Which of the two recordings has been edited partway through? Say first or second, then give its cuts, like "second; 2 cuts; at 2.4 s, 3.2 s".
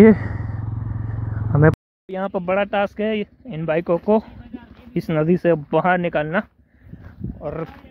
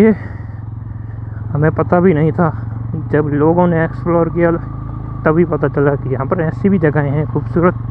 first; 1 cut; at 1.7 s